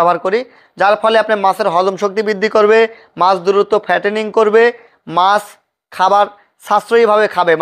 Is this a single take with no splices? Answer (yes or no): yes